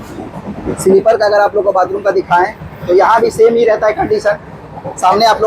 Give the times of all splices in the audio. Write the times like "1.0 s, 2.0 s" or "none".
none